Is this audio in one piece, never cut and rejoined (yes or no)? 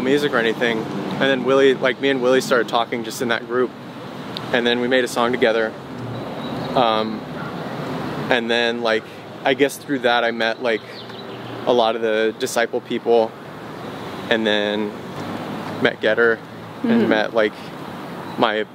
yes